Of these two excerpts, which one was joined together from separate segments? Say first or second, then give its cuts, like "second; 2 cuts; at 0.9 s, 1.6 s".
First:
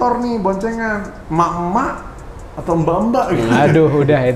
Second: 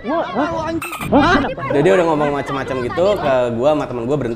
first; 1 cut; at 1.2 s